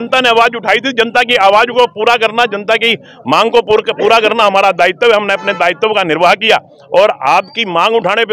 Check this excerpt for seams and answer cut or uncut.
uncut